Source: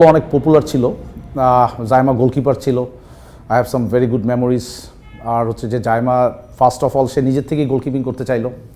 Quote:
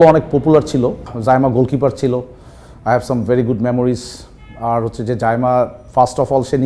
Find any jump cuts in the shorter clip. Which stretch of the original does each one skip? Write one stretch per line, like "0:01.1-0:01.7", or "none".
0:01.1-0:01.8